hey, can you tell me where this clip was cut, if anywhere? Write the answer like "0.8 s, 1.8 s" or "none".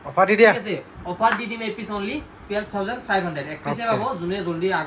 none

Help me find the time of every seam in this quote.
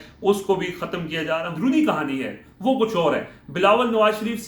1.4 s

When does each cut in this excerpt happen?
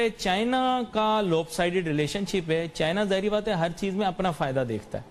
none

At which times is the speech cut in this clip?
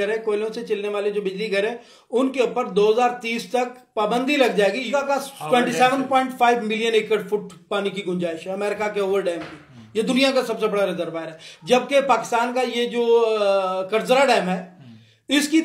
4.9 s

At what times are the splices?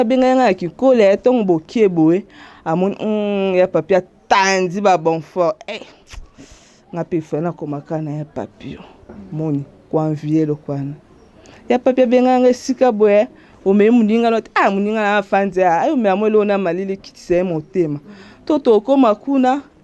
none

